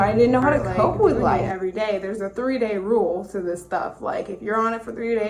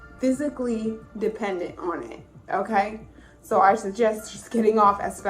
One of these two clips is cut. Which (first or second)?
first